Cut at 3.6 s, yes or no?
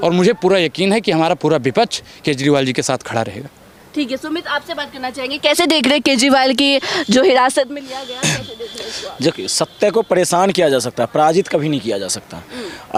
no